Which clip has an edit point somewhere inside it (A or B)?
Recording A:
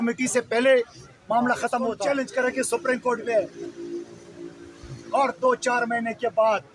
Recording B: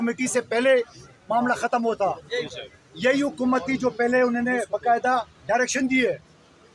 A